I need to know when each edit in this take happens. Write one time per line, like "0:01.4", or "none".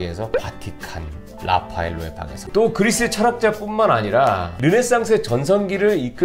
0:02.4